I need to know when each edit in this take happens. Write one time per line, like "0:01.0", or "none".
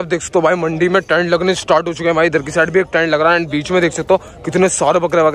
none